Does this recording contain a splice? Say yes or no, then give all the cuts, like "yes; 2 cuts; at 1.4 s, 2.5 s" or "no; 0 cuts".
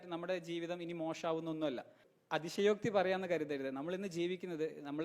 yes; 1 cut; at 2.1 s